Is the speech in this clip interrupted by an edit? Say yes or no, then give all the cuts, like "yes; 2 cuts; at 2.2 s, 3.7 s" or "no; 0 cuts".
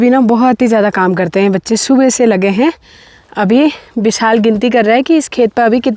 no; 0 cuts